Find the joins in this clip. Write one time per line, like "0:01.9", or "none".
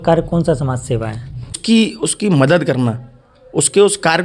0:01.6